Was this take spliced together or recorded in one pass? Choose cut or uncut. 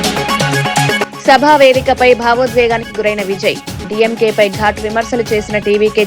cut